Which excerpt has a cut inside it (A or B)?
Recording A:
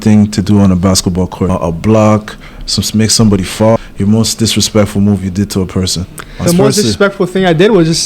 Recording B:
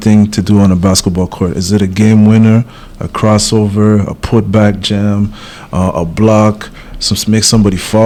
A